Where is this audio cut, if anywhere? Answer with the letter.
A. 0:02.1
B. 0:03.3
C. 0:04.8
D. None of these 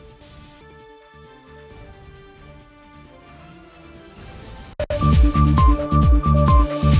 C